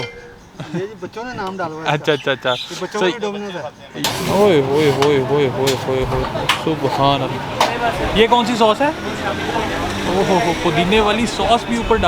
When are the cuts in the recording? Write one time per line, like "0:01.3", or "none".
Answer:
0:04.0